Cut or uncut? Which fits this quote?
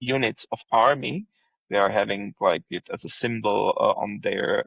uncut